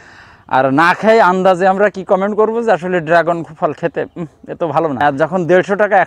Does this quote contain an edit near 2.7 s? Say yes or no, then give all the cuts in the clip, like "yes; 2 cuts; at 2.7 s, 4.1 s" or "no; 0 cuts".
no; 1 cut; at 5.0 s